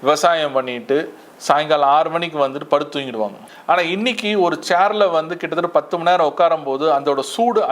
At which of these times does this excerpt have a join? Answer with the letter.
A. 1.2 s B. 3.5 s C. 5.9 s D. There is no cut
B